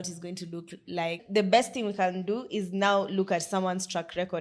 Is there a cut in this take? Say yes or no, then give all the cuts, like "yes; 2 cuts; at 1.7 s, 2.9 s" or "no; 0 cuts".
yes; 1 cut; at 1.2 s